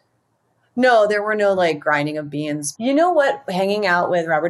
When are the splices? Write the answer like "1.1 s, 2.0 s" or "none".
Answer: 2.6 s